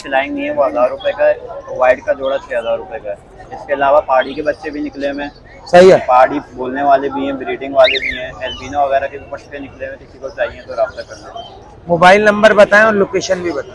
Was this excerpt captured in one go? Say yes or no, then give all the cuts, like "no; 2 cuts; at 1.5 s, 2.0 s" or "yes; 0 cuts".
yes; 0 cuts